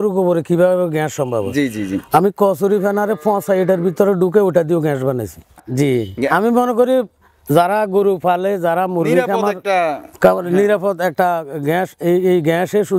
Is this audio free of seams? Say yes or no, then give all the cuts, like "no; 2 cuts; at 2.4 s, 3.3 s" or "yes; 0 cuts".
no; 1 cut; at 5.6 s